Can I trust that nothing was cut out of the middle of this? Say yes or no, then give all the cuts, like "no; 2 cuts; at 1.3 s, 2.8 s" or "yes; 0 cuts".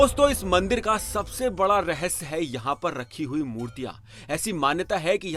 yes; 0 cuts